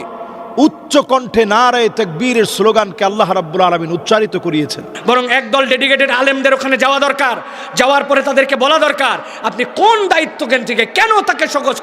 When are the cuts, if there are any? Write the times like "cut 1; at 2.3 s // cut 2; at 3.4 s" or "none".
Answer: cut 1; at 4.9 s